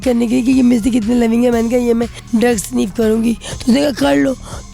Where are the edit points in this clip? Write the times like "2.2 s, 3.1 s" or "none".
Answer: 2.2 s, 3.5 s